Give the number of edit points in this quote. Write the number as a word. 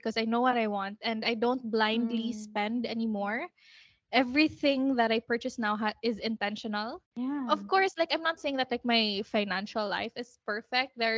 zero